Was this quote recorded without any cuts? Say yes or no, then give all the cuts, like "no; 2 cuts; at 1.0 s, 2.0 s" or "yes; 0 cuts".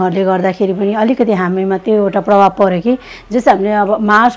yes; 0 cuts